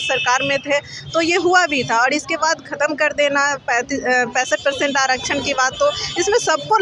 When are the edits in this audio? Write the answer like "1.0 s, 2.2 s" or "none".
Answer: none